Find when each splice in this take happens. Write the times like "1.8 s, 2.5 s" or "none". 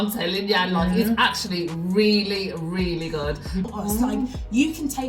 3.6 s